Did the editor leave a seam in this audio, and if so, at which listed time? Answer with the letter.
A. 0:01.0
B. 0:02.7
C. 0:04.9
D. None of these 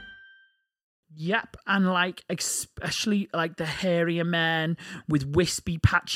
A